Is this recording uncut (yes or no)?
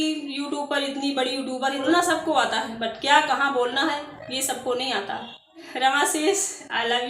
no